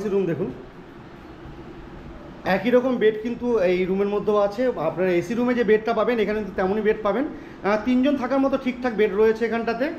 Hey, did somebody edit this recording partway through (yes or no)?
no